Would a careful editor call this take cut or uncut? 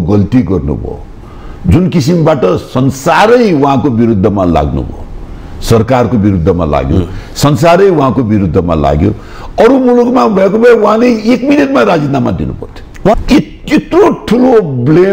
cut